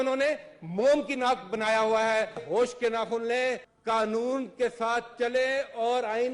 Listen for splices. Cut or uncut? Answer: cut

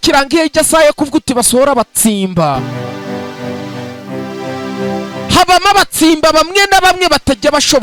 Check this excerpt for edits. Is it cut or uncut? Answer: uncut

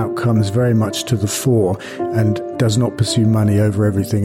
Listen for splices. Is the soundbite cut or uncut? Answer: cut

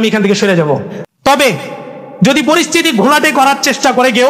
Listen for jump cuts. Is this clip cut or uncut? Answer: cut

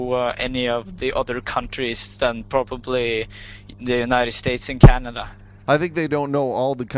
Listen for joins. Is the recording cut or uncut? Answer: cut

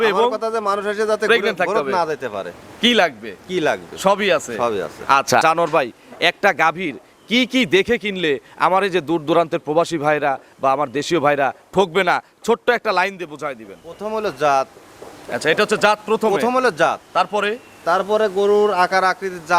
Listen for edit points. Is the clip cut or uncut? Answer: cut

